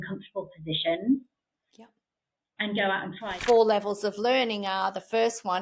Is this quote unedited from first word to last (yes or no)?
no